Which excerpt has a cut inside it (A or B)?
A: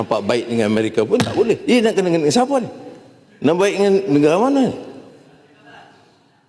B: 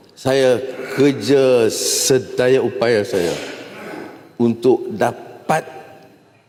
A